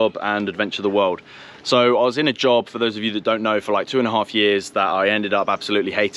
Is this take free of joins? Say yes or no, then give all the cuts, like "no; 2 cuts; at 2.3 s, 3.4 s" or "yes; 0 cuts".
yes; 0 cuts